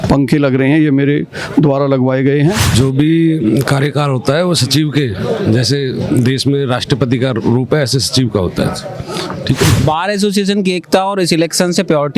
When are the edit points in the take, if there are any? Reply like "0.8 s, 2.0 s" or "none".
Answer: 2.7 s, 9.8 s